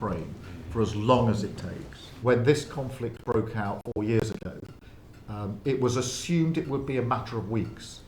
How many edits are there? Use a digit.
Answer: 1